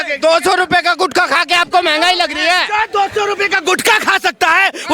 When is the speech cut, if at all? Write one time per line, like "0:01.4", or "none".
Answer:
none